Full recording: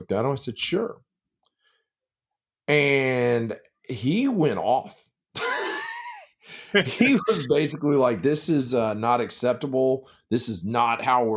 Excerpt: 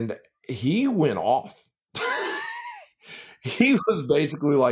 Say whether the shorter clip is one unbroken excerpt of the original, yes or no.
yes